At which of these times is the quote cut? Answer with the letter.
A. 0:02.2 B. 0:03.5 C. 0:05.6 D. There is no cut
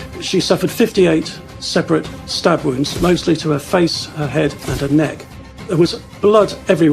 C